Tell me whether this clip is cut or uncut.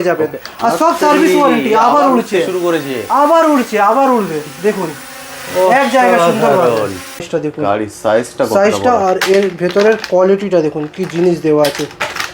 cut